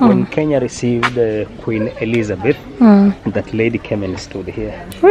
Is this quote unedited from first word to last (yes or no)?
yes